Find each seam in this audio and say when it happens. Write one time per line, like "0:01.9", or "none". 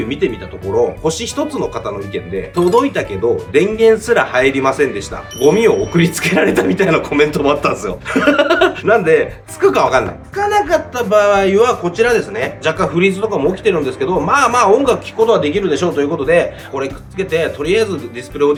none